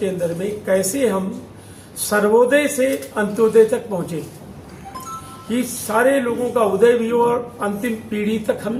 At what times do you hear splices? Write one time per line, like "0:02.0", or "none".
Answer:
none

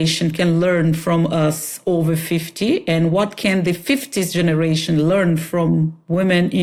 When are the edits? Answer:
none

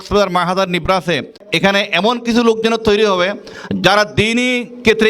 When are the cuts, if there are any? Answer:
0:01.4

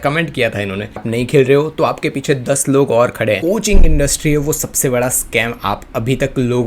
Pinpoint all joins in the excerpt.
0:01.0
0:03.4

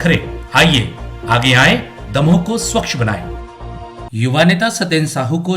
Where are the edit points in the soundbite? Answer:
0:04.0

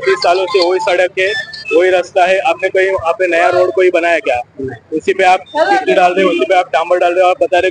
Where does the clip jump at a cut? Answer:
none

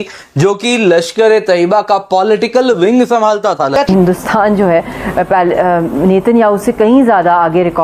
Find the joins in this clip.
0:03.9

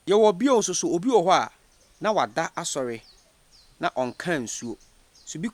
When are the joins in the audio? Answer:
none

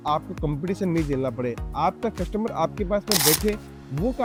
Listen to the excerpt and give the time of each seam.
none

